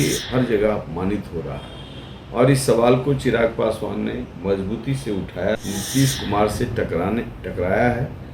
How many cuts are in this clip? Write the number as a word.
one